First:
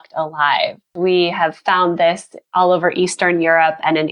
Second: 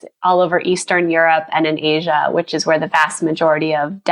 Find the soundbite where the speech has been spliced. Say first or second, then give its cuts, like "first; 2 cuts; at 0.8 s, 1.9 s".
first; 1 cut; at 0.9 s